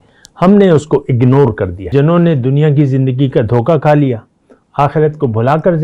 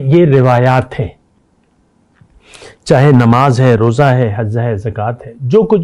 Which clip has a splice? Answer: first; 1 cut; at 1.9 s

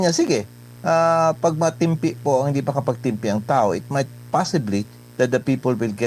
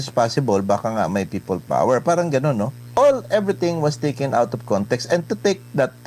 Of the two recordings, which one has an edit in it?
second; 1 cut; at 2.8 s

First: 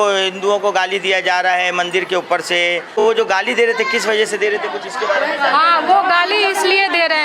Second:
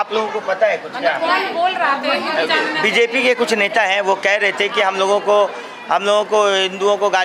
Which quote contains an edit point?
first; 1 cut; at 2.9 s

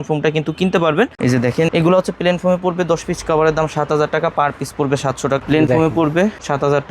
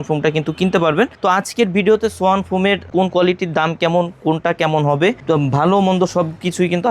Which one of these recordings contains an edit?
first; 2 cuts; at 1.1 s, 5.4 s

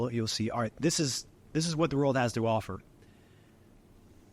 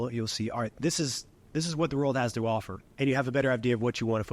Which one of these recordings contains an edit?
second; 1 cut; at 2.8 s

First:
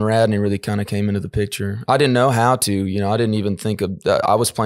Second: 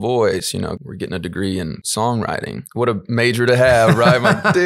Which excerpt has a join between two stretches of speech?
second; 3 cuts; at 0.8 s, 1.8 s, 2.6 s

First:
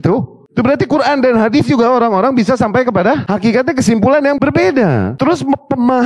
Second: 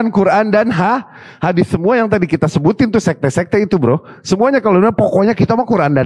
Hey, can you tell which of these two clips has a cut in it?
first; 3 cuts; at 3.2 s, 4.4 s, 5.1 s

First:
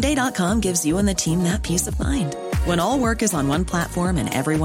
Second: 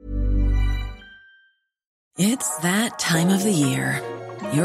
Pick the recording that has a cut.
second; 1 cut; at 2.0 s

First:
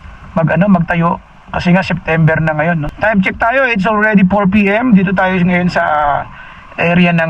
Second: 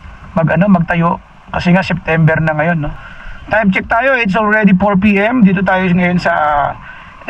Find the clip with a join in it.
first; 1 cut; at 2.9 s

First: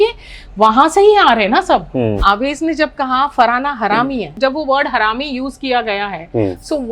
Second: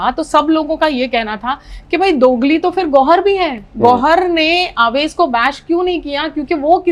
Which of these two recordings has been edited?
first; 2 cuts; at 2.2 s, 4.3 s

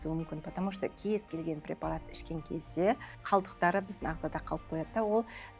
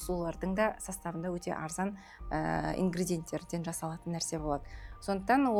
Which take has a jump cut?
first; 1 cut; at 3.1 s

